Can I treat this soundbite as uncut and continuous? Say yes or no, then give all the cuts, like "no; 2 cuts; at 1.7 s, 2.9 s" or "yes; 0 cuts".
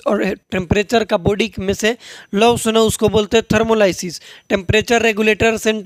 yes; 0 cuts